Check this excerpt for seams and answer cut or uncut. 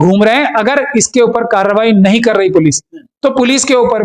uncut